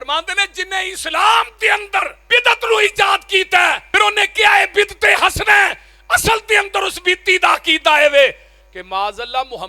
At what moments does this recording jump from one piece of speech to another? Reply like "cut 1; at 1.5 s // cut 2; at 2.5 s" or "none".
cut 1; at 2.2 s // cut 2; at 3.8 s